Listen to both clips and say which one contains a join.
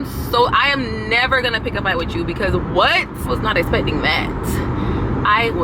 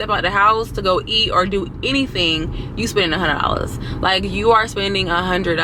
first; 1 cut; at 3.3 s

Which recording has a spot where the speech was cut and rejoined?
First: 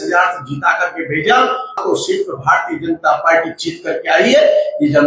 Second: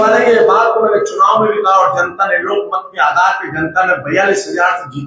first; 1 cut; at 1.8 s

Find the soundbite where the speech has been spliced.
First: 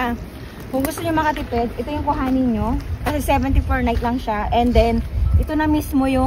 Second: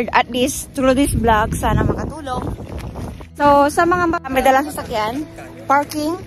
second; 2 cuts; at 3.3 s, 4.3 s

